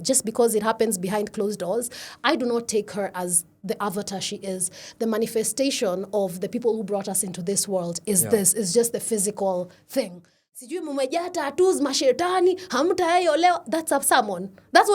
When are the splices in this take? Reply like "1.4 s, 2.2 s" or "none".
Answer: 10.4 s